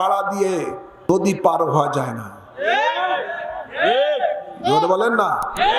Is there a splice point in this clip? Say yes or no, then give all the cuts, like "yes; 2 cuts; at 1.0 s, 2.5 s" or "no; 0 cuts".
yes; 1 cut; at 1.1 s